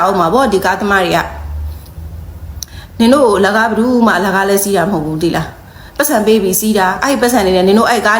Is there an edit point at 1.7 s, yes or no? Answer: no